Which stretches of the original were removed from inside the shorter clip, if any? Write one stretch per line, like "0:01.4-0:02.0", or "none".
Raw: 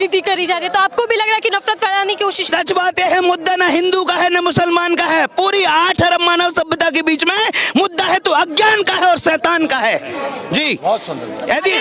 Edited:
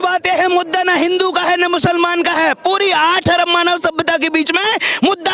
none